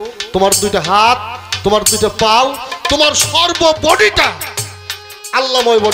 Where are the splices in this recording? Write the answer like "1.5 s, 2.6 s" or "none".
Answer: none